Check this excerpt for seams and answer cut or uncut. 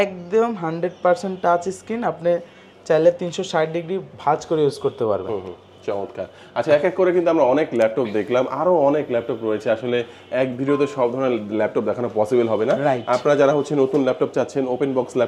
uncut